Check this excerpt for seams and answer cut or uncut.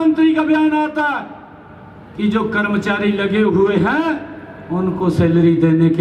uncut